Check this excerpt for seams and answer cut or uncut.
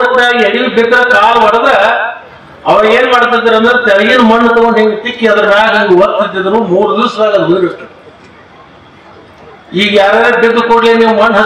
uncut